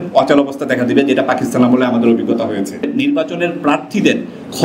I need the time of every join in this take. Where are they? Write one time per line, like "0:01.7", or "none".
0:02.8